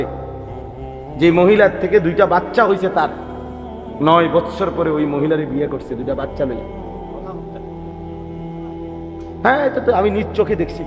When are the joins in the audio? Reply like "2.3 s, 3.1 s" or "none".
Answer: 6.6 s, 9.3 s